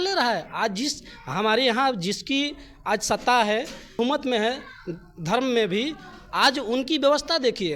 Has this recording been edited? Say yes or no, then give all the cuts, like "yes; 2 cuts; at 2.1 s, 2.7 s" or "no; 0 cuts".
yes; 1 cut; at 4.0 s